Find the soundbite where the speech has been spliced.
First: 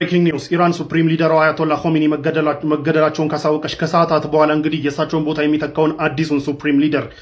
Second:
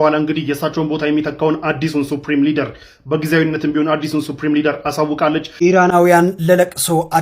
second; 1 cut; at 5.5 s

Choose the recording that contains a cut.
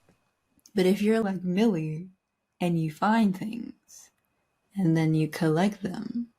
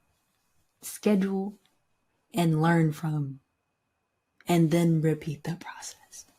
first; 1 cut; at 1.2 s

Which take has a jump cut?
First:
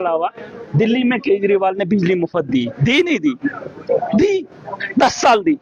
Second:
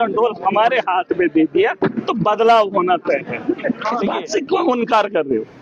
second; 1 cut; at 4.0 s

